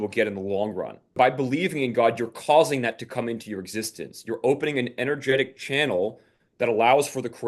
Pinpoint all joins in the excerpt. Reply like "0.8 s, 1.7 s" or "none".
1.2 s